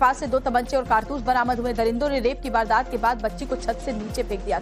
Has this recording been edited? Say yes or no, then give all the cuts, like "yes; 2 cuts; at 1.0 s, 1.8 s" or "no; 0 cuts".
yes; 1 cut; at 1.4 s